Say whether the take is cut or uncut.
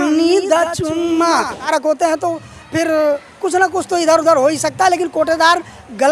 cut